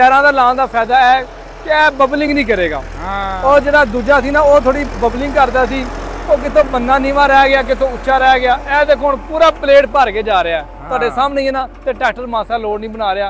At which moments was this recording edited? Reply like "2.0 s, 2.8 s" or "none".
none